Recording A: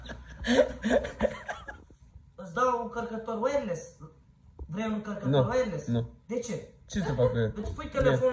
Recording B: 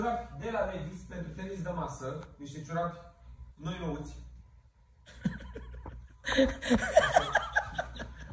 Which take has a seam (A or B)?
A